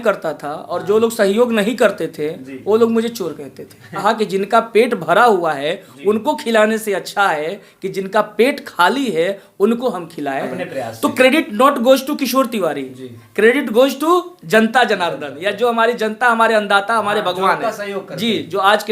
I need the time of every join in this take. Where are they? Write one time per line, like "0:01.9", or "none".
0:04.0
0:10.5